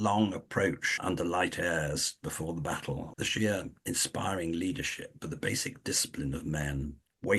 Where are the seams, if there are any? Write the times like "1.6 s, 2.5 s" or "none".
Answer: 1.0 s, 3.1 s, 3.7 s